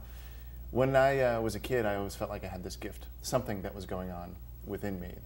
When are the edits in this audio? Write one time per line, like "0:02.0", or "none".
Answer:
none